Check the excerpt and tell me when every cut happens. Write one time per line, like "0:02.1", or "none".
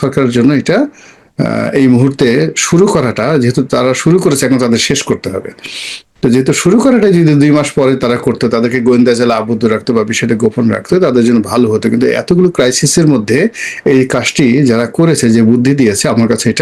none